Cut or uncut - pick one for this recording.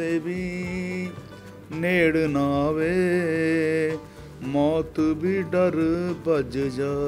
uncut